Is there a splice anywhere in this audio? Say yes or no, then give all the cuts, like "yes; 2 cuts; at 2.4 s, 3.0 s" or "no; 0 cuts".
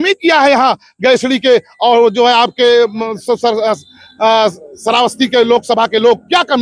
no; 0 cuts